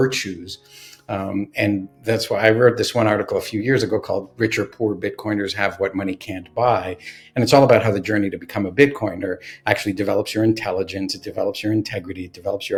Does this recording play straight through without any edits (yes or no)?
yes